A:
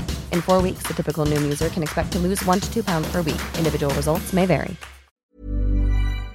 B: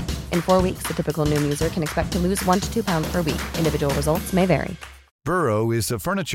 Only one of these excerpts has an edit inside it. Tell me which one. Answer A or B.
A